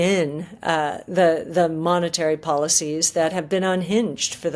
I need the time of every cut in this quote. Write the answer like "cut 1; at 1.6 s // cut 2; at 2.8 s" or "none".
none